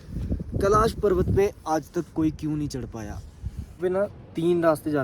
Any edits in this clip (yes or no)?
yes